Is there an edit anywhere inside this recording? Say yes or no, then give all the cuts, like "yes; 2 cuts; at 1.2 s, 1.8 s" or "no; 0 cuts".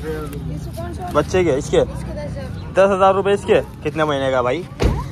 no; 0 cuts